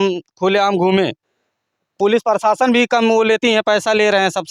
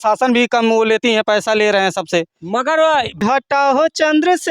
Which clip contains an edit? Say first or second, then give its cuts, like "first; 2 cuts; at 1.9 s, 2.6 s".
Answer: second; 1 cut; at 3.2 s